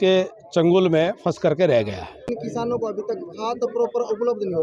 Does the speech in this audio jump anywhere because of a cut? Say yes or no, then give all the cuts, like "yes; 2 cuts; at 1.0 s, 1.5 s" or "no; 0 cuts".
yes; 1 cut; at 2.2 s